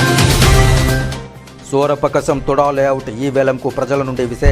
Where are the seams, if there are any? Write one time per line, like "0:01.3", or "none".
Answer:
0:01.2